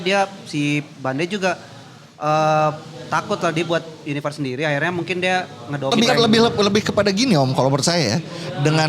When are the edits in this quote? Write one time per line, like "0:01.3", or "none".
0:05.9